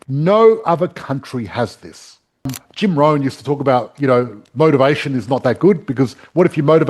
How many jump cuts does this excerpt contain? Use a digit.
1